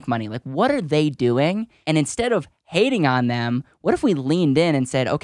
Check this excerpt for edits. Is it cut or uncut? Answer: cut